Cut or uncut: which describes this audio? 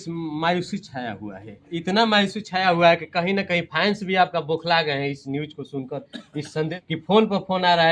cut